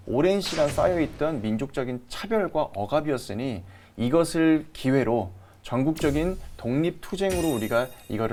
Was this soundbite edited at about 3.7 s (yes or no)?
no